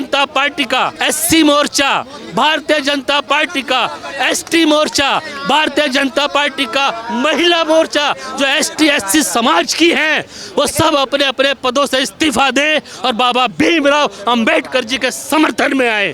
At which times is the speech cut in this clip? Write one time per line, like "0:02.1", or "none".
0:01.0